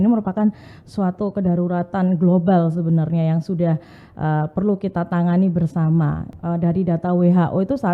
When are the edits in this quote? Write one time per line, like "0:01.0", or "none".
0:06.3

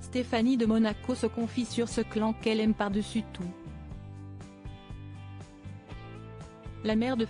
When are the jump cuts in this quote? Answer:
0:03.5
0:06.2

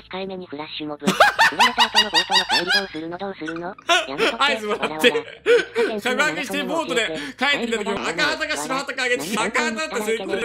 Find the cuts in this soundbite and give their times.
none

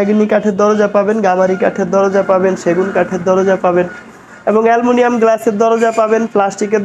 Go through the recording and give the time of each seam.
none

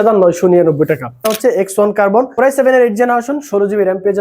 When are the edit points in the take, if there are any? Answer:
0:01.3
0:02.3

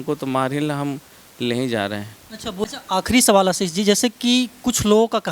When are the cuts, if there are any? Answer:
0:02.6

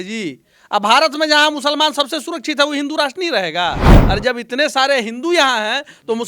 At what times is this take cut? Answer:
0:03.9

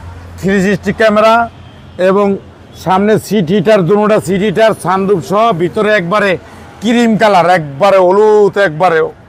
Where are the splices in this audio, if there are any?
none

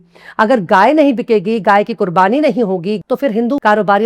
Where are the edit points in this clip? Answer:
0:03.0

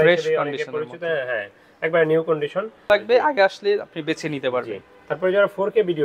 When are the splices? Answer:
0:02.9

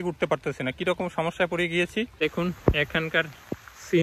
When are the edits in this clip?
0:02.1

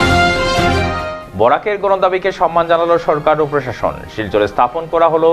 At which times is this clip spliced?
0:01.1

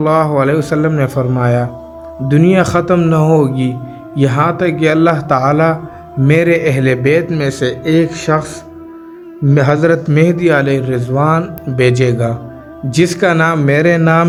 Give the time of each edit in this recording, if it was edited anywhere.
none

